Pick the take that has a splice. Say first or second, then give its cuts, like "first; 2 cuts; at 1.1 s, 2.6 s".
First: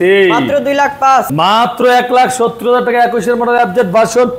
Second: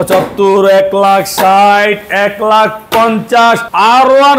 first; 1 cut; at 1.3 s